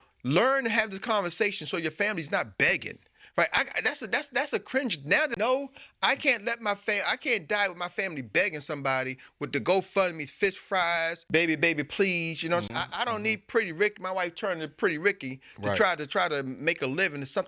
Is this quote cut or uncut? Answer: cut